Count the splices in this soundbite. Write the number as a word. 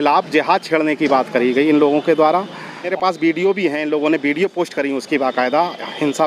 one